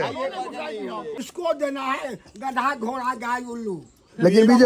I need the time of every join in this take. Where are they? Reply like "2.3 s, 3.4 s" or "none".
1.2 s